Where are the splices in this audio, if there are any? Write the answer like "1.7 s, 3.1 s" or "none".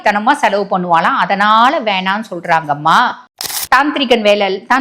3.3 s